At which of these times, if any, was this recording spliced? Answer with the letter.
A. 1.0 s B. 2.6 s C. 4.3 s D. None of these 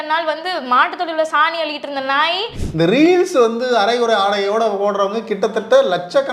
B